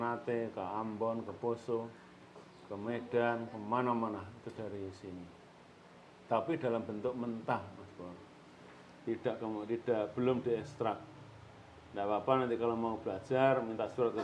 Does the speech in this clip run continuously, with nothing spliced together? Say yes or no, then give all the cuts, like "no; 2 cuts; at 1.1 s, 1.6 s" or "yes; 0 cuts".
yes; 0 cuts